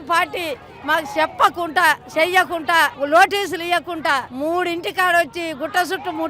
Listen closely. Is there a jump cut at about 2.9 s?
yes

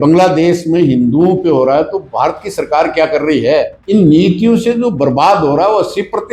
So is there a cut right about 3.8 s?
yes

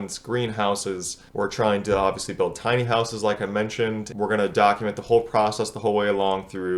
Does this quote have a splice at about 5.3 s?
no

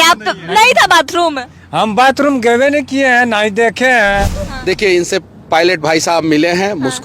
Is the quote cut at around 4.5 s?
yes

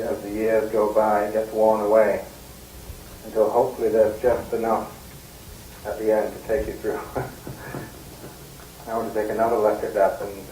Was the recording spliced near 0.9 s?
yes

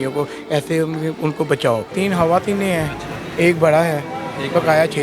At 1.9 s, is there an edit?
yes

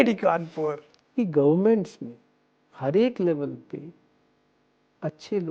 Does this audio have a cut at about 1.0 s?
yes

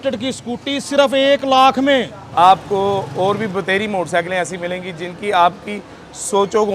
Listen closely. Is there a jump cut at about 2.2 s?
yes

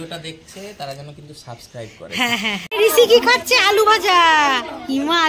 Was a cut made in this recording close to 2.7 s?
yes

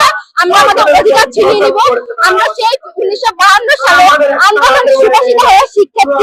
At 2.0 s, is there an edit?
no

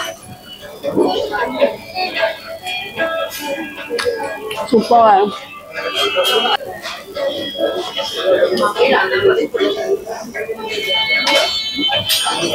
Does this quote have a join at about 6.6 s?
yes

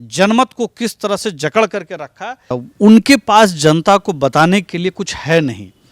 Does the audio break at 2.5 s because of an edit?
yes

